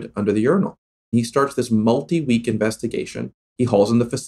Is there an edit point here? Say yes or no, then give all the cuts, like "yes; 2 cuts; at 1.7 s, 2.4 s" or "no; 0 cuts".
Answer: yes; 2 cuts; at 1.0 s, 3.4 s